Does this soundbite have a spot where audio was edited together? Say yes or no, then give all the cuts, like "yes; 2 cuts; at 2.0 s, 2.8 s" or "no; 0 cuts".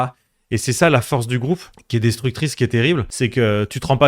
yes; 2 cuts; at 1.7 s, 3.1 s